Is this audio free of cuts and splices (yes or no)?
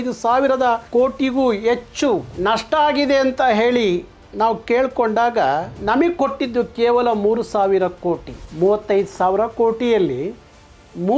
yes